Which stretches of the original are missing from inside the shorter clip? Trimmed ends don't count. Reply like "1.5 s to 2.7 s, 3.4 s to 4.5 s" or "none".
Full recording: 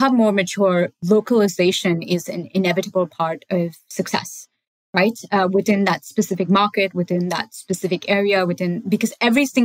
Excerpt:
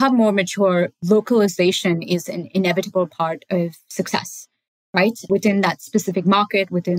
5.3 s to 5.5 s